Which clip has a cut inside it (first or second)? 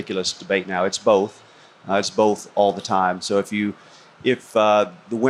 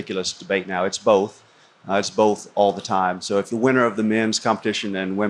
second